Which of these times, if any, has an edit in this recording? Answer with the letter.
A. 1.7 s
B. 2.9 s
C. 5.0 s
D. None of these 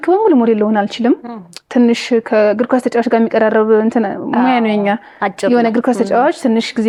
D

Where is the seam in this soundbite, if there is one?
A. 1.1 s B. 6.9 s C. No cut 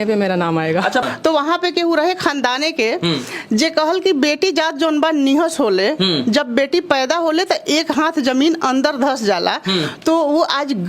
A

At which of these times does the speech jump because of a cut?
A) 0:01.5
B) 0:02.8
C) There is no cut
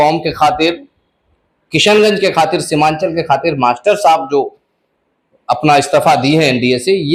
C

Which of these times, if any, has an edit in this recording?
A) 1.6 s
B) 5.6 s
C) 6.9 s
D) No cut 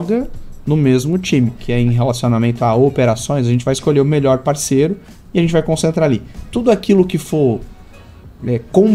A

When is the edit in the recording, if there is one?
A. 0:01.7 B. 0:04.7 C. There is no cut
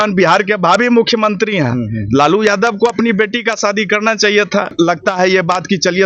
B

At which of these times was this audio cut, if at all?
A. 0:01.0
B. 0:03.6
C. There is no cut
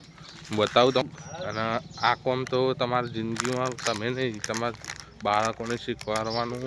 A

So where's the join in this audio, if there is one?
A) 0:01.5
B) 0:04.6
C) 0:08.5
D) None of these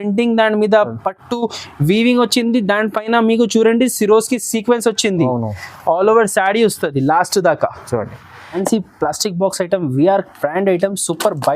C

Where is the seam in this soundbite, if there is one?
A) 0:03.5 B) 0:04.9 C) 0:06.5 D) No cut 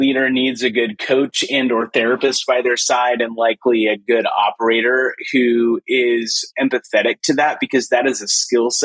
C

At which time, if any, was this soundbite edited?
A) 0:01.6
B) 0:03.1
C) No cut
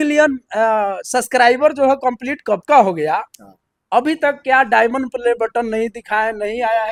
C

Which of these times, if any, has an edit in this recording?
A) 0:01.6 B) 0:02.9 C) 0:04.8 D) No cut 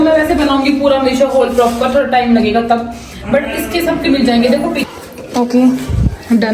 C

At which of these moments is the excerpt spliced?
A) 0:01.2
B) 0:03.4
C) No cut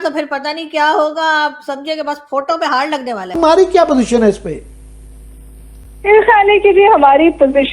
B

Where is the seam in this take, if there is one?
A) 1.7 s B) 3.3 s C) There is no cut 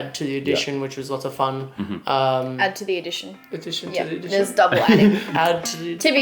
B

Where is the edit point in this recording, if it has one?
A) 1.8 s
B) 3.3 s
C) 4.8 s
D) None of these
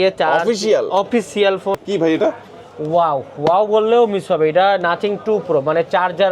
A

